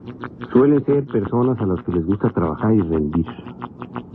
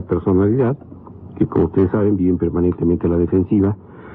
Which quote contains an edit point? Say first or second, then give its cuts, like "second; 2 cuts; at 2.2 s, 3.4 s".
first; 1 cut; at 2.8 s